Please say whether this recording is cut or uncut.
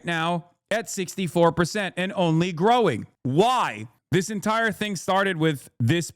cut